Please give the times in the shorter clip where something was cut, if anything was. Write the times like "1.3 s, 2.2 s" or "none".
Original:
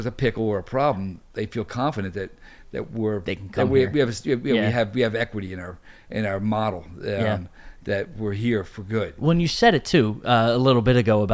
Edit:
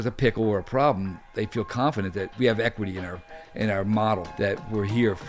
2.3 s, 4.3 s